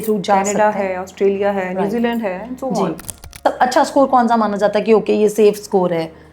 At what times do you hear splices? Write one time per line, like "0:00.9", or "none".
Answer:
0:03.3

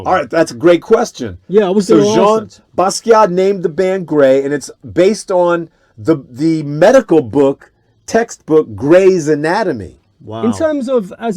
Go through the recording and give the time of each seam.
0:10.4

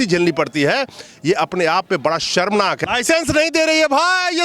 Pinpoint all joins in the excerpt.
0:02.8

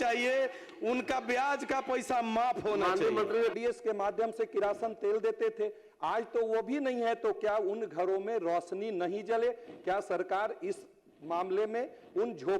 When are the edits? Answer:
0:03.6

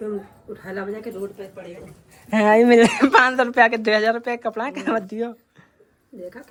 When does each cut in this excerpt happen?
none

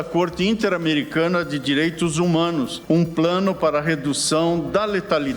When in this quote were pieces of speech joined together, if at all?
0:02.8

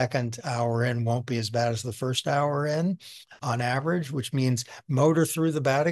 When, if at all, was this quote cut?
none

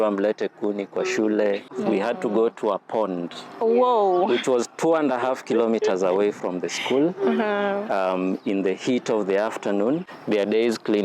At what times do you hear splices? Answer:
0:01.7
0:10.1

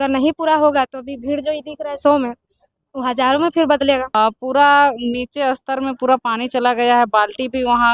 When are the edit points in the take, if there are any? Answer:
0:04.1

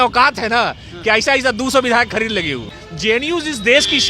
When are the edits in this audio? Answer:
0:02.8

